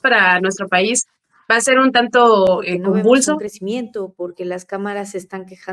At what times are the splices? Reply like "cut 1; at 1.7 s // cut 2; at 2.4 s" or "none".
cut 1; at 3.5 s